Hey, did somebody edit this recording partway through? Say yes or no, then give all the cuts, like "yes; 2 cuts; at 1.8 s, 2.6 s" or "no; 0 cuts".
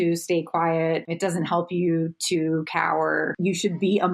yes; 2 cuts; at 1.1 s, 3.4 s